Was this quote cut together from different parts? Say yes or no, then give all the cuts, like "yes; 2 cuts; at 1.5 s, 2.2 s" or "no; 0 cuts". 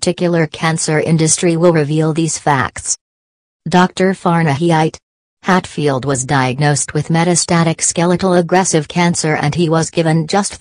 yes; 1 cut; at 5.2 s